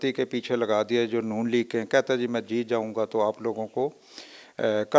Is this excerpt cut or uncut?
uncut